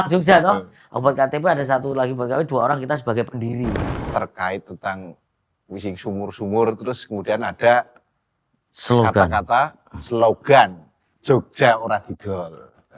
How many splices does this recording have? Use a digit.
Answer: 1